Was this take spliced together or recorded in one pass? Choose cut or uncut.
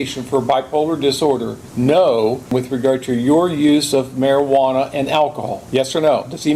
cut